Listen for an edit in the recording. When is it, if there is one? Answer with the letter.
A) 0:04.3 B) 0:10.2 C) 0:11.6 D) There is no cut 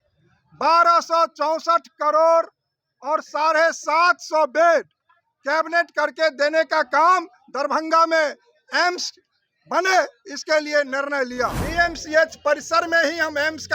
C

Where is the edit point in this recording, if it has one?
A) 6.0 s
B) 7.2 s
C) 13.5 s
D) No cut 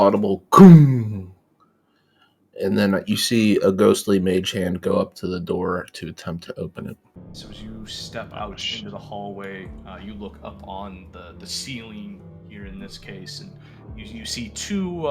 B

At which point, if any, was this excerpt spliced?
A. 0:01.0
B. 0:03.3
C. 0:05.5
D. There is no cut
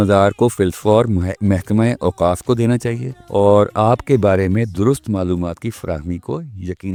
D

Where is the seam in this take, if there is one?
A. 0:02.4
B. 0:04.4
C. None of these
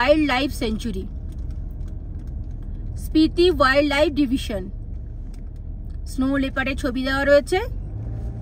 C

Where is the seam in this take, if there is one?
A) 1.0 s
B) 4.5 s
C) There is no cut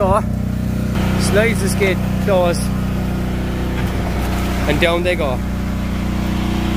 A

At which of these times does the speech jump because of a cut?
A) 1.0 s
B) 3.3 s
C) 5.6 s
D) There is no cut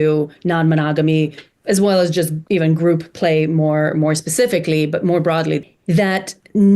C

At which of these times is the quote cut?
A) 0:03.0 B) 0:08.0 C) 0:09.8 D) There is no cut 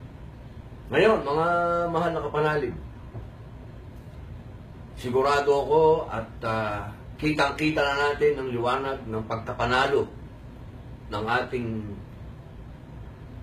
C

